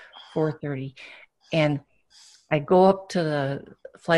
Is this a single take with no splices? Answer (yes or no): yes